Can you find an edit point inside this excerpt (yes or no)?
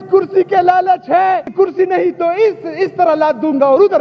yes